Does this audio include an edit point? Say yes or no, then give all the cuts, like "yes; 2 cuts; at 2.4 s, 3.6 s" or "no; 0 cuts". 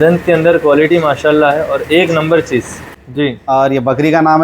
yes; 1 cut; at 3.0 s